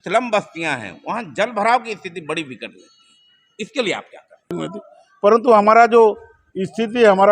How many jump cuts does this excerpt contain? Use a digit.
1